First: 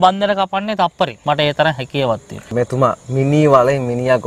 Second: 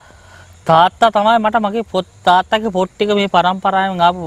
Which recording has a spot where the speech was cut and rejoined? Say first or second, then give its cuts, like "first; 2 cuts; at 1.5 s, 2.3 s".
first; 2 cuts; at 1.2 s, 2.5 s